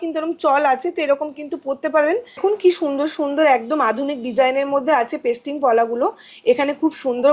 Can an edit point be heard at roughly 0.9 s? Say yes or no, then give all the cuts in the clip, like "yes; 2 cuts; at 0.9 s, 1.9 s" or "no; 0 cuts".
no; 1 cut; at 2.4 s